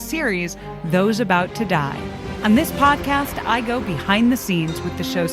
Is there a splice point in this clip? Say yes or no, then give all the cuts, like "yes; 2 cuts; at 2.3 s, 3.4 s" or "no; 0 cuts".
yes; 1 cut; at 2.3 s